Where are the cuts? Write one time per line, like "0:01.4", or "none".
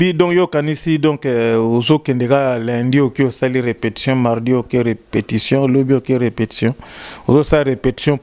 none